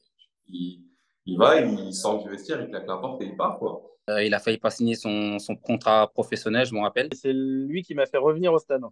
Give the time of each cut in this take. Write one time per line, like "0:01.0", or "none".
0:04.0
0:07.1